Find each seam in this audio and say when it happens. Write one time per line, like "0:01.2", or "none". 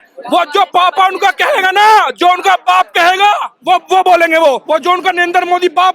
0:04.6

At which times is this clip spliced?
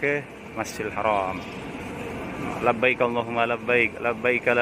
none

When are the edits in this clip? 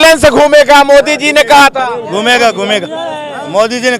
none

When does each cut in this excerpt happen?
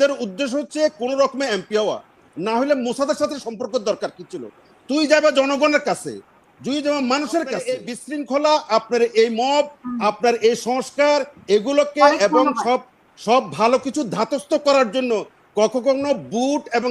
0:08.0

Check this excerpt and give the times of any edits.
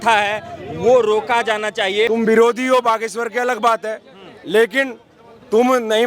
0:02.1

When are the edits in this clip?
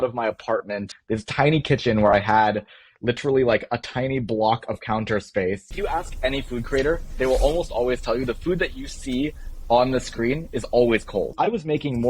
0:00.9
0:05.7
0:11.3

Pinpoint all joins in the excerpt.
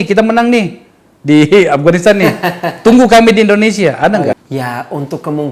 0:04.4

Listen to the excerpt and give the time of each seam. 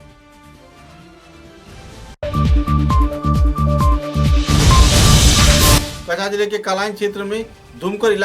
0:05.9

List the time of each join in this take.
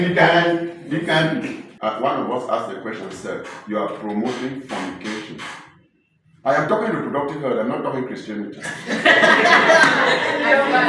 0:01.7

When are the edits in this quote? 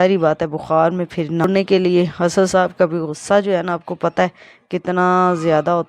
0:01.4

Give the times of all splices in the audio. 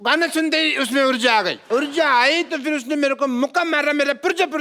0:01.6

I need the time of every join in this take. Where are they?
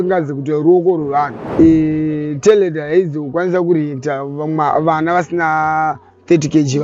0:01.4

